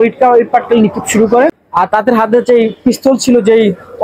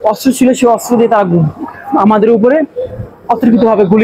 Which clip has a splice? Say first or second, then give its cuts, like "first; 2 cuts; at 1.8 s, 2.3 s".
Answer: first; 1 cut; at 1.6 s